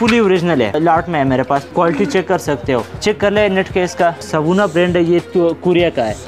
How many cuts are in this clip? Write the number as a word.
four